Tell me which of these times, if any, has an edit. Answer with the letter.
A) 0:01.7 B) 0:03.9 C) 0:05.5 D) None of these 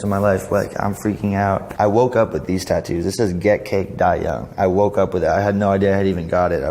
A